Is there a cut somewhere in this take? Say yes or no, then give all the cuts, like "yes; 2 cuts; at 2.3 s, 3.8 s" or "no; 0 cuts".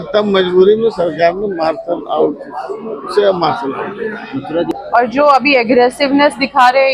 yes; 1 cut; at 4.8 s